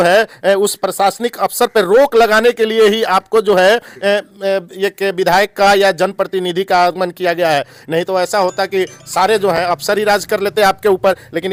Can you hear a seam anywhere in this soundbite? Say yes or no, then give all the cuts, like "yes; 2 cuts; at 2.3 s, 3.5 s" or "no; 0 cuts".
no; 0 cuts